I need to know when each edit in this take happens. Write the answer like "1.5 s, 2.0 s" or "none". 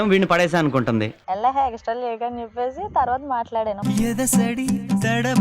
1.2 s